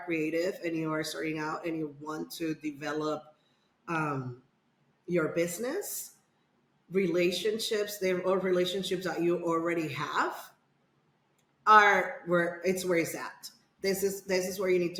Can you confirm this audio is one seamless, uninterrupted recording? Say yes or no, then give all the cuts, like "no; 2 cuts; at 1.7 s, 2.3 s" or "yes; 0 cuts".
yes; 0 cuts